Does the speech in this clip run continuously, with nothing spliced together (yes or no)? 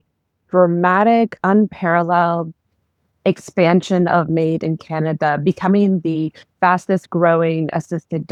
yes